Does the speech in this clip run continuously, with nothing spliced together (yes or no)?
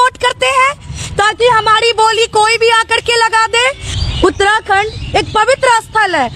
no